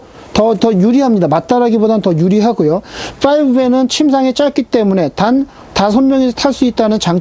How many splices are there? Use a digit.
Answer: 0